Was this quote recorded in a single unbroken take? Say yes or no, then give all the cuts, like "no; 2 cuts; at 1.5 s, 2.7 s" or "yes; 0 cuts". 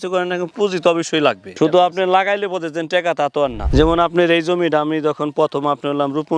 no; 2 cuts; at 1.5 s, 3.6 s